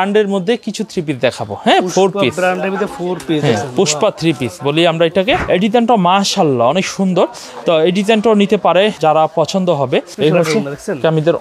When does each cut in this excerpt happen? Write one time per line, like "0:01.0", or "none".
0:05.4
0:09.0
0:10.1